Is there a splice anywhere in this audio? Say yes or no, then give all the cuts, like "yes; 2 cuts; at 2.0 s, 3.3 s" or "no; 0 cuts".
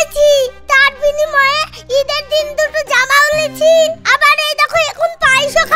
no; 0 cuts